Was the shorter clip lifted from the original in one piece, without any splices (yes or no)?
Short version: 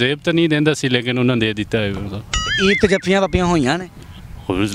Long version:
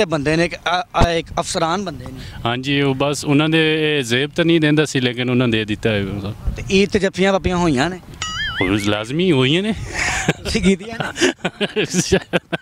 yes